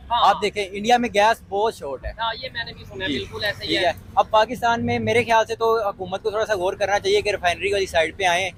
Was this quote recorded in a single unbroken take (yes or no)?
yes